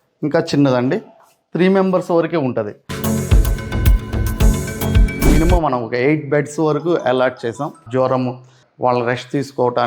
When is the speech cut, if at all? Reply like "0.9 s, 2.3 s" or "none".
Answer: 5.3 s